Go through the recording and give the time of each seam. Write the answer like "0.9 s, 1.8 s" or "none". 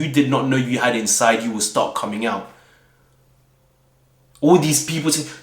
none

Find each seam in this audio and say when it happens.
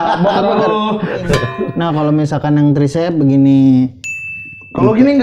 1.2 s

